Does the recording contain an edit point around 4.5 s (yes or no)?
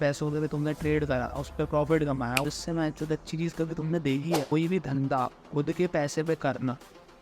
yes